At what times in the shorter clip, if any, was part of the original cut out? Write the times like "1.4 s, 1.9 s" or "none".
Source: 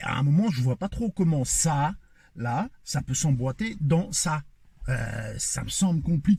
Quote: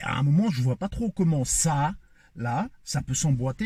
none